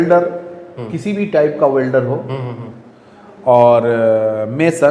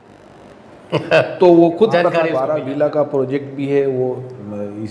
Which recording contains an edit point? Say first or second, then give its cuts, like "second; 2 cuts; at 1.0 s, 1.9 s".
second; 1 cut; at 2.4 s